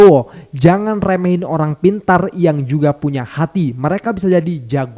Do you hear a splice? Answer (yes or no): no